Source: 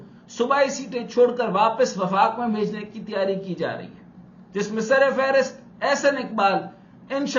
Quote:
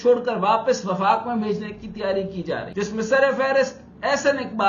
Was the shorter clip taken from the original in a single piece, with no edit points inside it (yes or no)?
no